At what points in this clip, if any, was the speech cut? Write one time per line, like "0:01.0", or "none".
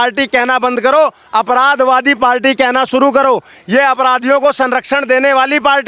none